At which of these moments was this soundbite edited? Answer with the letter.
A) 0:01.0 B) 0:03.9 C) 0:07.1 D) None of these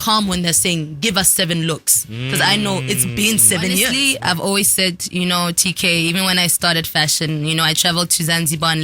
B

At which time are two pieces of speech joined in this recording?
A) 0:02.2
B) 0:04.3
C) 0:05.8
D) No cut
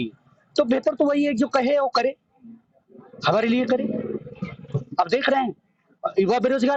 D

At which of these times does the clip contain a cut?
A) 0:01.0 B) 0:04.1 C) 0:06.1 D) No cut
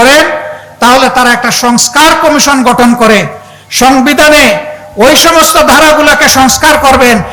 D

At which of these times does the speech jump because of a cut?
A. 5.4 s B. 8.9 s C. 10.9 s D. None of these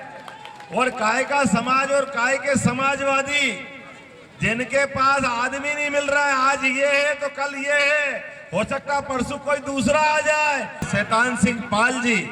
C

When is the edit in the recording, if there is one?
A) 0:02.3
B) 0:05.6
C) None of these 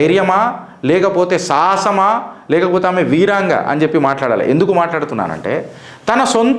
C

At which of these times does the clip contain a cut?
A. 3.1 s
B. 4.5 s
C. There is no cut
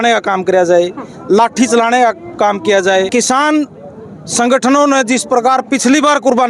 A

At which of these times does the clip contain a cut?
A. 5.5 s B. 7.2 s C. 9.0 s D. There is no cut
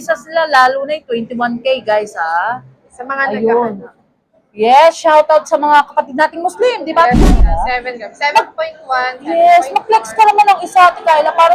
B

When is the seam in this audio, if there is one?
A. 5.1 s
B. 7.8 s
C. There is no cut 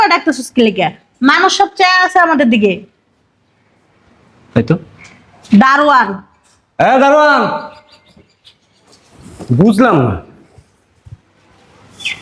C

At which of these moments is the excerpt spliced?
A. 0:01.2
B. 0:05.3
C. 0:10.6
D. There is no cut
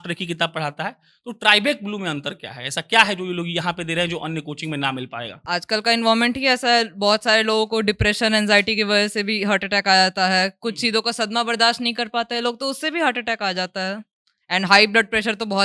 B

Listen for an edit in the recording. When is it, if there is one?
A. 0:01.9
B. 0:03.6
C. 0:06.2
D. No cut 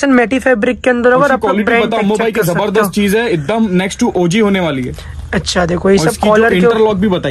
D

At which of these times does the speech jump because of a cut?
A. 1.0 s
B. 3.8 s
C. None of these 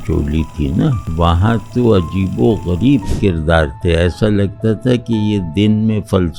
A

